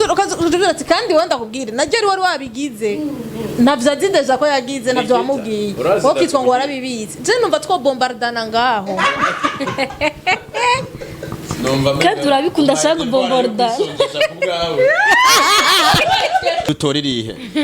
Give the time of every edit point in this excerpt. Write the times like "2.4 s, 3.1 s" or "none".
16.6 s